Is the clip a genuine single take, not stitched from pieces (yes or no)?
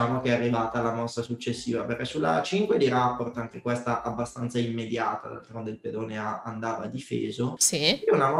yes